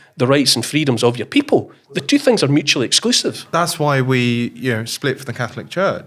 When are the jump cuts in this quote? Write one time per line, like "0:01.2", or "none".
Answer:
none